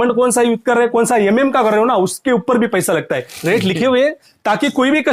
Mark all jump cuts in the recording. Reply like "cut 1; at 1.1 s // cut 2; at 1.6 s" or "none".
cut 1; at 3.2 s